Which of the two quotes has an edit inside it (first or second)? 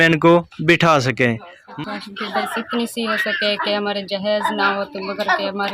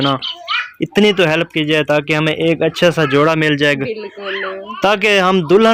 first